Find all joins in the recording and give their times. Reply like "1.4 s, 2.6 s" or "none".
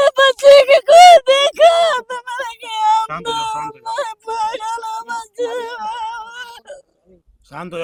none